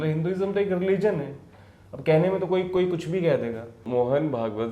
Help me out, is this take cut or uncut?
cut